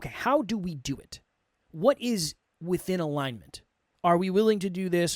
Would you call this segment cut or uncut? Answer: uncut